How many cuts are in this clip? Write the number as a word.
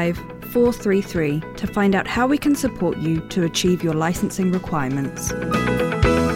one